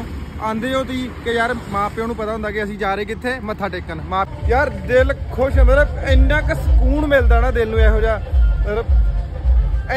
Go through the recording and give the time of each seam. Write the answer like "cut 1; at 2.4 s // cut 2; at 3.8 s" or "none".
cut 1; at 4.3 s